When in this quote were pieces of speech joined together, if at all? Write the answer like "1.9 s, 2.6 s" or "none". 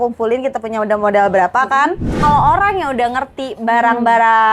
2.1 s